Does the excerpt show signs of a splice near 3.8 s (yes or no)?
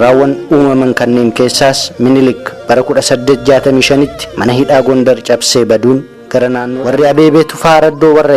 no